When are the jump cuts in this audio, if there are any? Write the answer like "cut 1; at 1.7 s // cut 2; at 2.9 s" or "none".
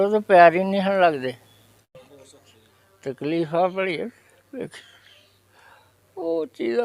cut 1; at 1.9 s

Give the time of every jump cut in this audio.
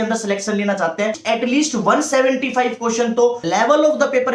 cut 1; at 1.2 s // cut 2; at 3.4 s

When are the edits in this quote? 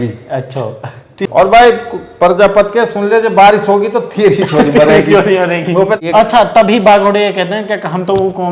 cut 1; at 1.2 s // cut 2; at 6.0 s

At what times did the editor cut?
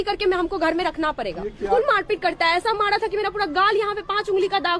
cut 1; at 1.7 s

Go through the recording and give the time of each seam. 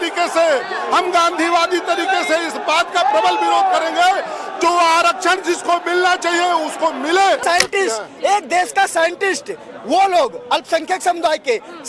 cut 1; at 7.4 s

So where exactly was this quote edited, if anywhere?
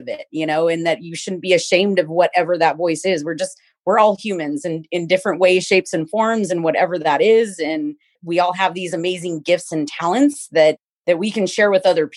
none

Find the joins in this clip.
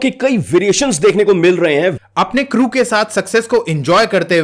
cut 1; at 2.0 s

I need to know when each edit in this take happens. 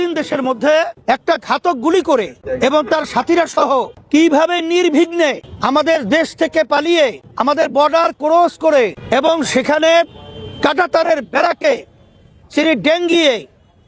cut 1; at 0.9 s // cut 2; at 2.4 s // cut 3; at 4.0 s // cut 4; at 5.5 s // cut 5; at 7.3 s // cut 6; at 9.0 s

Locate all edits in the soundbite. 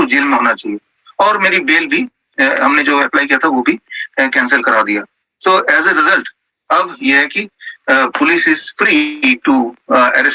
none

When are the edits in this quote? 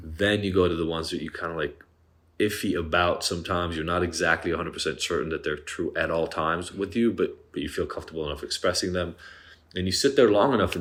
none

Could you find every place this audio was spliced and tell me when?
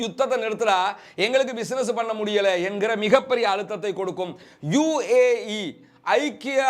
cut 1; at 4.4 s

